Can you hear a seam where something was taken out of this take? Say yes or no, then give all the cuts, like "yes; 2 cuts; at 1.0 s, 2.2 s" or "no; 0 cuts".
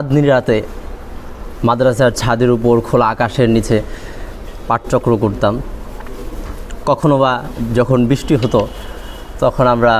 no; 0 cuts